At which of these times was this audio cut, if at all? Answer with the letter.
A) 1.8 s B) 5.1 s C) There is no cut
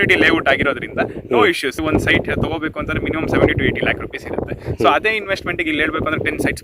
A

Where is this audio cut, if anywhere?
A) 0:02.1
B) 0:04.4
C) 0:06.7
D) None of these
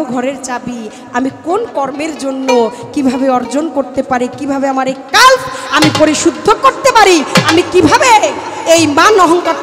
D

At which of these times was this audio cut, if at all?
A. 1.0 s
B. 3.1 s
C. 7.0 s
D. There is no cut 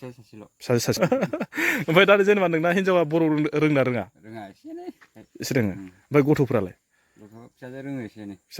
A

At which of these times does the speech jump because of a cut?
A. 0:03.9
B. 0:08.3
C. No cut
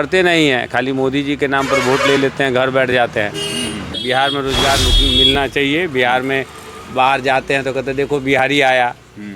A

